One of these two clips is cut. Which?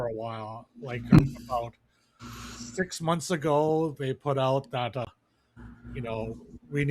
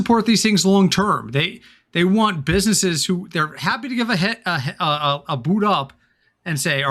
first; 2 cuts; at 1.2 s, 5.1 s

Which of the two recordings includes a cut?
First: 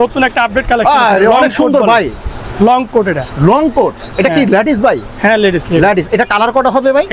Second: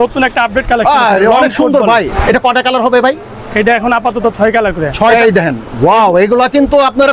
second; 2 cuts; at 2.1 s, 5.1 s

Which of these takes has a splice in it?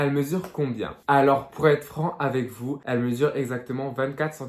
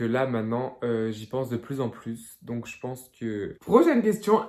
second; 1 cut; at 3.6 s

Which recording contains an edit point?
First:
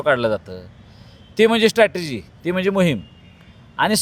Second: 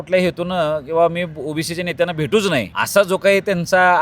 second; 1 cut; at 2.8 s

